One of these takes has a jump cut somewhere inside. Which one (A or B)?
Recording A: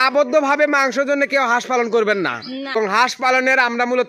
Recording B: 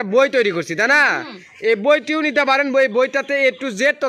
A